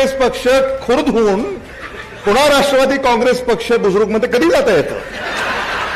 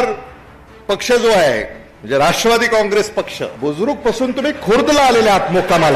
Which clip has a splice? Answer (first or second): second